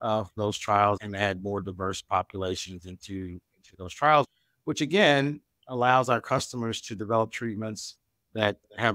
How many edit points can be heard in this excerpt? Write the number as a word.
two